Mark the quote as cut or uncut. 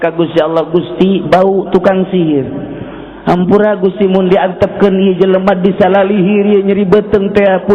uncut